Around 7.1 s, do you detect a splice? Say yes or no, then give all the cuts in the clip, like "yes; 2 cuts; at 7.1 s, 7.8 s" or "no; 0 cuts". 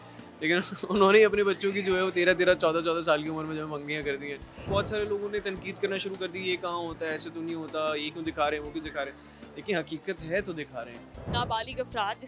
no; 2 cuts; at 4.7 s, 11.3 s